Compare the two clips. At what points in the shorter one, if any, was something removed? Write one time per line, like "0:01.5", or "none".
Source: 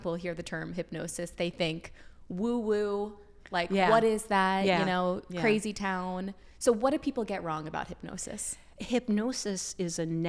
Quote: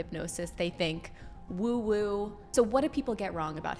0:02.4